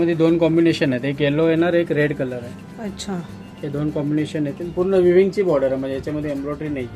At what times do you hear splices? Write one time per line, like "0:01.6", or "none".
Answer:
0:04.7

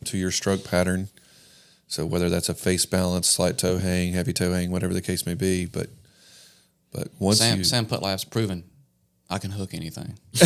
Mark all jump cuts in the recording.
none

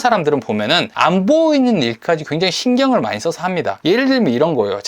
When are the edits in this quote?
0:00.9
0:03.7

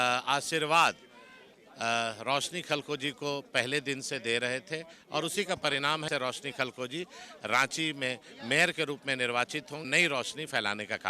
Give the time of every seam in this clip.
0:06.1
0:09.9

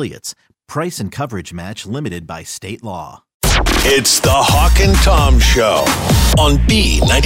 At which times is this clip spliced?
0:03.3

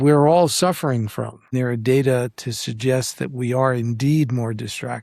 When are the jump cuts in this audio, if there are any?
0:01.5

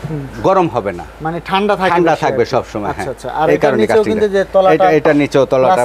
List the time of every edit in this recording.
none

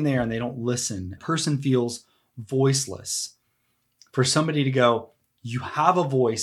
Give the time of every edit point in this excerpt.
0:01.1

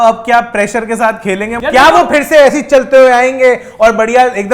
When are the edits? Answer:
0:01.5

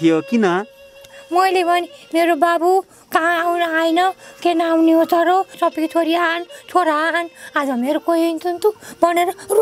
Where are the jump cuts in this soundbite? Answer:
0:05.5

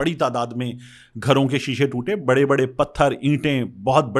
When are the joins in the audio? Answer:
none

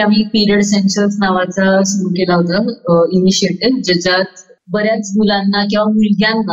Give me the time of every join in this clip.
none

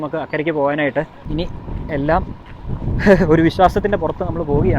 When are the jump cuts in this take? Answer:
0:01.2

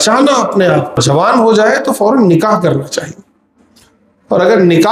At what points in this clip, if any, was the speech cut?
0:01.0

